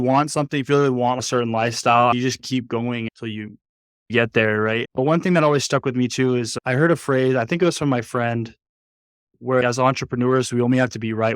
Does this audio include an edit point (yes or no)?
yes